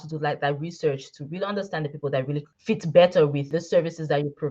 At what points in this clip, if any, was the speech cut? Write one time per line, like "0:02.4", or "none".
0:02.5
0:03.4